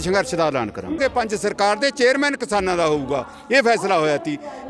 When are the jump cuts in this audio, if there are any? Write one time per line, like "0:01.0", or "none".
0:01.0